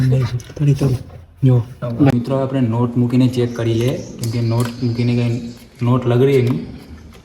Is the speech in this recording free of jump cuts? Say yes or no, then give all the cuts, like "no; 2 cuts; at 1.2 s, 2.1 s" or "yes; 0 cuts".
no; 1 cut; at 2.1 s